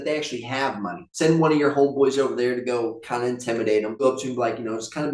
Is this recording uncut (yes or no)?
no